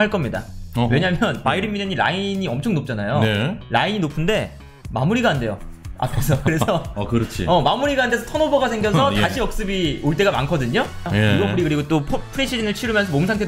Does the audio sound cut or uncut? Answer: cut